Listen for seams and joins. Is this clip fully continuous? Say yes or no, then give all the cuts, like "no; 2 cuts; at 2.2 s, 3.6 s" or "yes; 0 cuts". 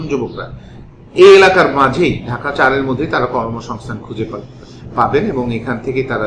yes; 0 cuts